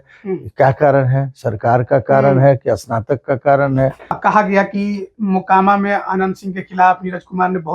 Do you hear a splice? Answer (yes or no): yes